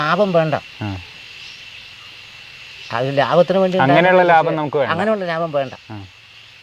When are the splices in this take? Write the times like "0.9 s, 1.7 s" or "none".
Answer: none